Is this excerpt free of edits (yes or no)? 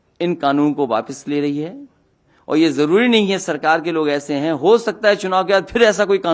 yes